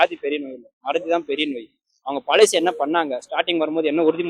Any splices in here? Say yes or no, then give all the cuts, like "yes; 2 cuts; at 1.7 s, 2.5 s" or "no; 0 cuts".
no; 0 cuts